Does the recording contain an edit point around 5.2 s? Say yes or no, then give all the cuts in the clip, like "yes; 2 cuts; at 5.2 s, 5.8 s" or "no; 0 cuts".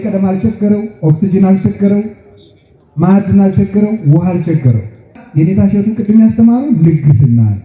yes; 1 cut; at 5.2 s